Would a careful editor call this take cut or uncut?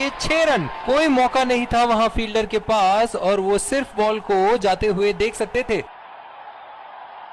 cut